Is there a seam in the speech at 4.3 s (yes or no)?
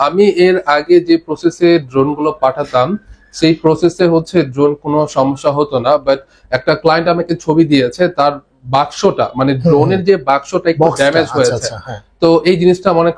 no